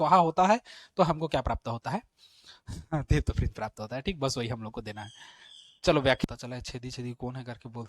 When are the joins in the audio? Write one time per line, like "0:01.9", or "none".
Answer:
0:06.3